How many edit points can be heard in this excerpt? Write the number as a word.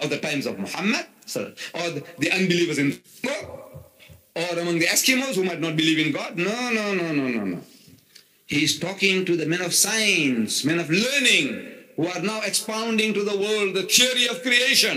zero